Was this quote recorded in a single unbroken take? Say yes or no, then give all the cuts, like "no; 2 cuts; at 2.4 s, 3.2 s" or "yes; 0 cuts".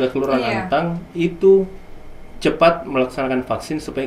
yes; 0 cuts